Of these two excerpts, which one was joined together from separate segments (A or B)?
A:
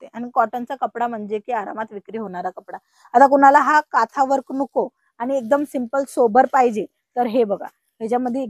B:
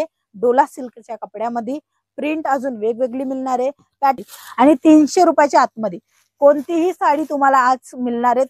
B